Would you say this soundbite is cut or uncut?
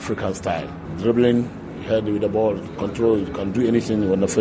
uncut